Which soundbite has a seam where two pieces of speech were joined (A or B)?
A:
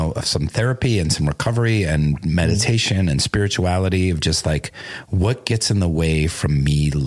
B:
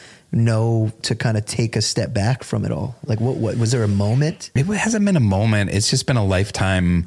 B